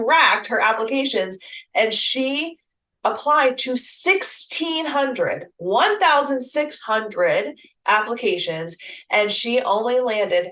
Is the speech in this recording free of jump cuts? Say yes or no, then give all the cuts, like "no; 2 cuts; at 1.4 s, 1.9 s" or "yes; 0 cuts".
yes; 0 cuts